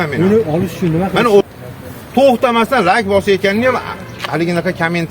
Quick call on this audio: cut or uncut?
cut